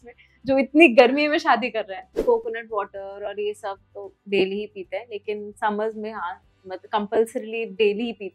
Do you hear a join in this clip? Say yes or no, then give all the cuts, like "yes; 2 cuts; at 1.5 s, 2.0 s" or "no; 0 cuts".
yes; 1 cut; at 2.1 s